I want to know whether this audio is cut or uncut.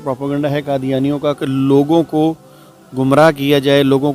uncut